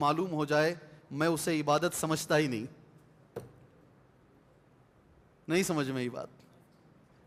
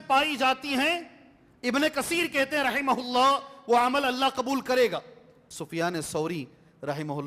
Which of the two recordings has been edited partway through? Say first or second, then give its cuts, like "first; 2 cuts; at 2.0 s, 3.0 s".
second; 1 cut; at 5.5 s